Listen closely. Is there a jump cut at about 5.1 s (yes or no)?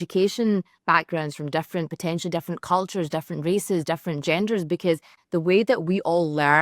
yes